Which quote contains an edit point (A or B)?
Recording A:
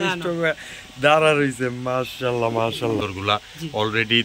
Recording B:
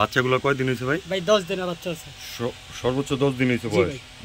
A